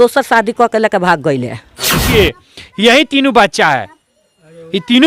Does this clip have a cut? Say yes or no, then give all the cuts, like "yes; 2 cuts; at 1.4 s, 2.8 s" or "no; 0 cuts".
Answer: yes; 1 cut; at 2.0 s